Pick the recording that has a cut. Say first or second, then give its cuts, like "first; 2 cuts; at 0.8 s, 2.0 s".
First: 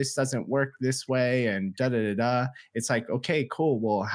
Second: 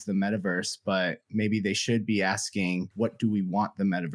second; 1 cut; at 2.9 s